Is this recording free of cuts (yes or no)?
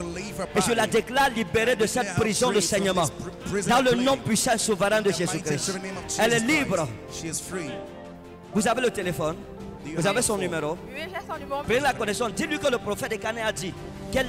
no